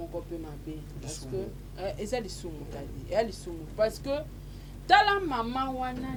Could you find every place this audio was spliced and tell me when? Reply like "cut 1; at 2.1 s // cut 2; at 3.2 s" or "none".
none